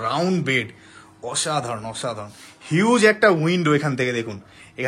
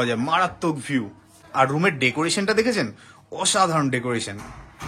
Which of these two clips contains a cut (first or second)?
second